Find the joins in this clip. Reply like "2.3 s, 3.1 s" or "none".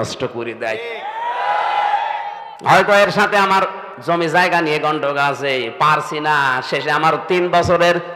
2.4 s, 3.9 s